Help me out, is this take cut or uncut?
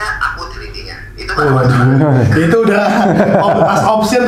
uncut